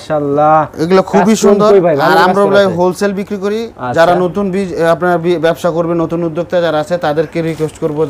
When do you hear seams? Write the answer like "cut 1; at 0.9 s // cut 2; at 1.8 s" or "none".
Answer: none